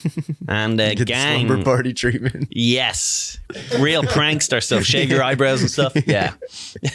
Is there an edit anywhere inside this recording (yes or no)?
no